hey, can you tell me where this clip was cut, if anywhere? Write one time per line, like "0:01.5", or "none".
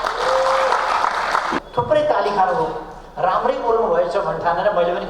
0:01.6